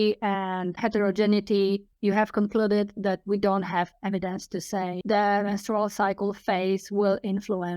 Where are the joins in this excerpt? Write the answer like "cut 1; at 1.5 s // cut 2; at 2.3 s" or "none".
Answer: cut 1; at 1.9 s // cut 2; at 5.0 s

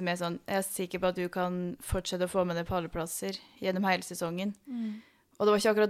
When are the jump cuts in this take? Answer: none

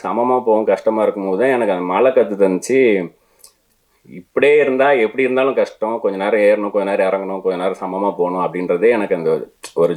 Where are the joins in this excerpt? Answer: none

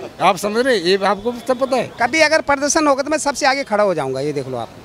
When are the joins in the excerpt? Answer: cut 1; at 1.9 s

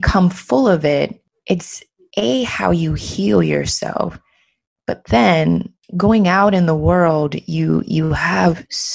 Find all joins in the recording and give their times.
cut 1; at 1.3 s // cut 2; at 5.8 s

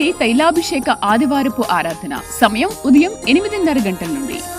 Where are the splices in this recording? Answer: none

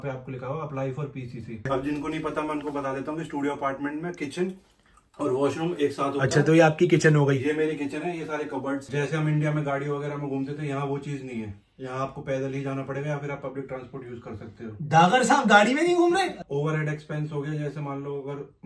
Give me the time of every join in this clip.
cut 1; at 1.7 s // cut 2; at 8.8 s // cut 3; at 16.4 s

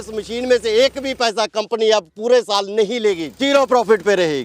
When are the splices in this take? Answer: cut 1; at 3.4 s

